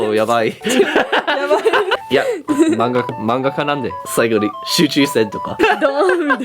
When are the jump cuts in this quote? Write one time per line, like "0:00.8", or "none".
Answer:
0:02.0
0:04.0
0:05.6